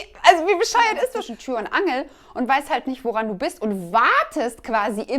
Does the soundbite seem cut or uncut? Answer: cut